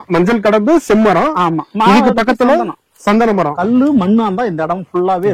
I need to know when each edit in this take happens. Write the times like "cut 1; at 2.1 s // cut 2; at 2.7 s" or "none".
cut 1; at 3.5 s